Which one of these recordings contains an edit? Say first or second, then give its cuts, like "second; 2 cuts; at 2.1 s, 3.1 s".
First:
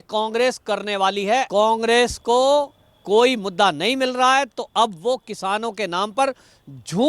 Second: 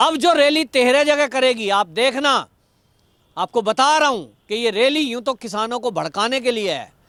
first; 1 cut; at 1.5 s